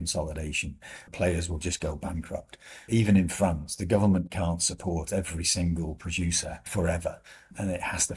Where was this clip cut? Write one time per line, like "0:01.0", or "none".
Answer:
0:01.1
0:06.5